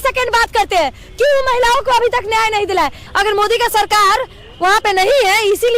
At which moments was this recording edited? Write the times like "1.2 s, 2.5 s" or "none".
3.0 s